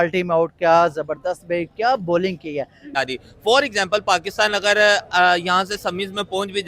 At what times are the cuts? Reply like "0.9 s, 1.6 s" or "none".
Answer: 2.9 s

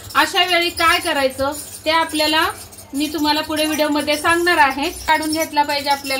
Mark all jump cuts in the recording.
5.1 s

